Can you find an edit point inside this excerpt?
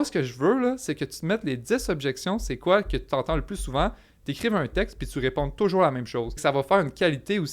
yes; 1 cut; at 6.4 s

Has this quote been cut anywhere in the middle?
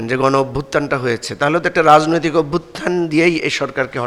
no; 0 cuts

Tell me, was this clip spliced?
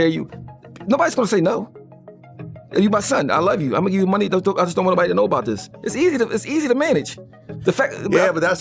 no; 0 cuts

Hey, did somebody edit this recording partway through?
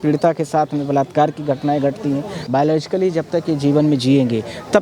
yes; 1 cut; at 2.3 s

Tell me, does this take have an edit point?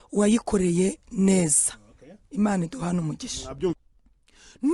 yes; 1 cut; at 3.7 s

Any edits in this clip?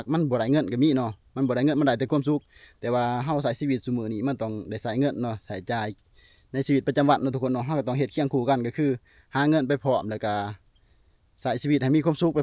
no; 0 cuts

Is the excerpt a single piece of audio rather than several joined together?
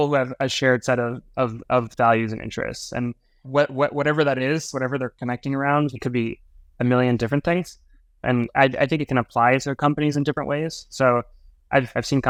yes; 0 cuts

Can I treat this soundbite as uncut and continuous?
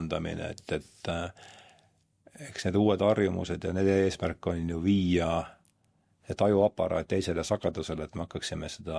yes; 0 cuts

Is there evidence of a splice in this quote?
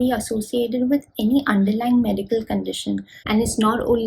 yes; 1 cut; at 3.1 s

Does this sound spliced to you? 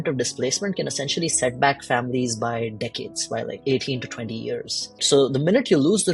yes; 2 cuts; at 3.6 s, 5.1 s

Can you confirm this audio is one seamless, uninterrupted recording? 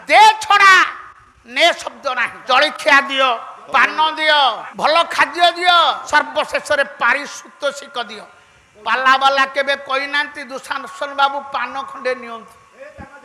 no; 4 cuts; at 2.3 s, 3.5 s, 4.7 s, 6.0 s

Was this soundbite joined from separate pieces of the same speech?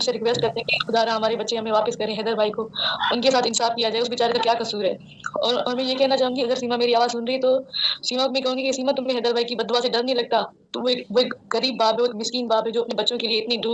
no; 0 cuts

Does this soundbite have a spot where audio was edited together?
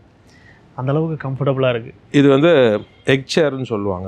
yes; 1 cut; at 2.0 s

